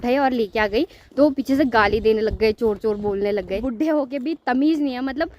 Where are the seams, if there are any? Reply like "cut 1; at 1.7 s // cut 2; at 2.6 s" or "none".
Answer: cut 1; at 3.6 s